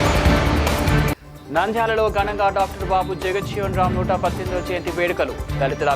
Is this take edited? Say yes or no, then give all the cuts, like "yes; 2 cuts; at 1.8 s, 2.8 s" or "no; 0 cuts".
yes; 1 cut; at 1.3 s